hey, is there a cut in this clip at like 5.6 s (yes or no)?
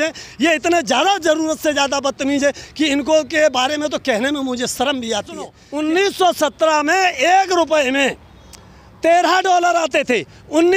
yes